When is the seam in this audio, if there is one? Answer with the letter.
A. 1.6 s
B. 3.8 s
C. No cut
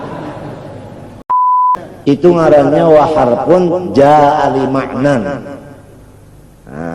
A